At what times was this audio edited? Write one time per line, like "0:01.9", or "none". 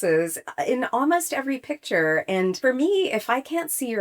0:02.6